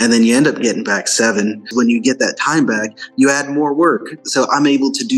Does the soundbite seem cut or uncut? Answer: cut